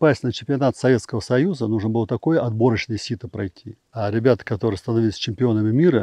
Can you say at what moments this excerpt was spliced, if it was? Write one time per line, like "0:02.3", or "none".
0:03.8